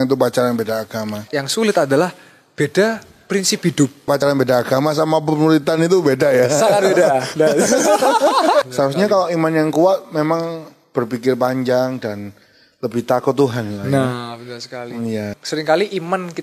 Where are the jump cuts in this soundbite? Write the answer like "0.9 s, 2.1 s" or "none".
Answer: 1.4 s, 4.2 s, 8.6 s, 15.4 s